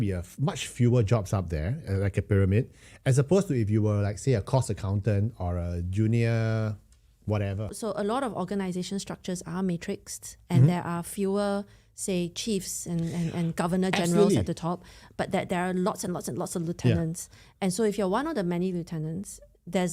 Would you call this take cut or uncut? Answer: cut